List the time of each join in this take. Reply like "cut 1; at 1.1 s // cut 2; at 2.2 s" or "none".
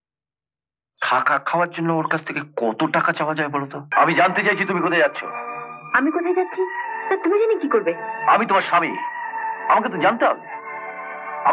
cut 1; at 3.9 s

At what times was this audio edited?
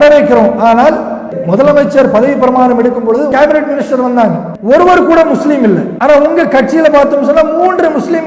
cut 1; at 1.4 s // cut 2; at 3.3 s // cut 3; at 4.5 s // cut 4; at 5.9 s

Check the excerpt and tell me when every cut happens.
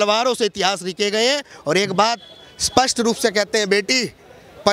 cut 1; at 1.5 s

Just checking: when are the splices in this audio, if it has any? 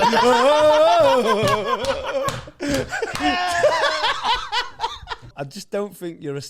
cut 1; at 5.3 s

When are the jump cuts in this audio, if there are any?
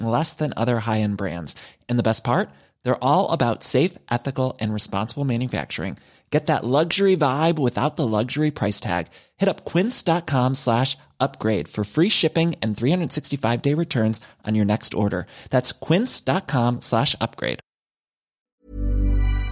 cut 1; at 18.5 s

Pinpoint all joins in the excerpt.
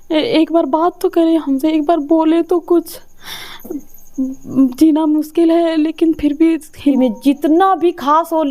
cut 1; at 6.9 s

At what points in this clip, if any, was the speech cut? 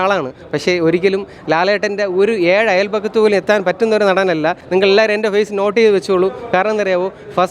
cut 1; at 4.6 s

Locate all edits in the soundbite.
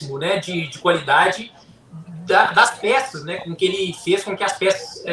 none

